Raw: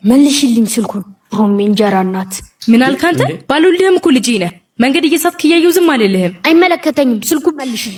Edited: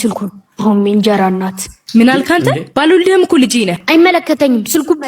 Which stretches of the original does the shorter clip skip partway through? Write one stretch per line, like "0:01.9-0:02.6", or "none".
0:04.5-0:06.4